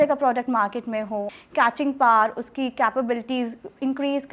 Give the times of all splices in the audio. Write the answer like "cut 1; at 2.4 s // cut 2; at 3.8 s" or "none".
cut 1; at 1.4 s